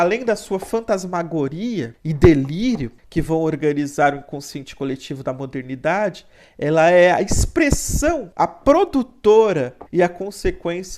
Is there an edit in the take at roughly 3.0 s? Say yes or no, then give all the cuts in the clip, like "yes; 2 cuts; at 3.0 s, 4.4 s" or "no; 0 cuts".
yes; 4 cuts; at 2.0 s, 3.0 s, 8.3 s, 9.8 s